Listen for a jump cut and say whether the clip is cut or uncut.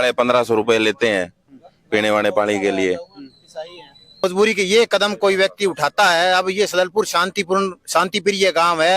cut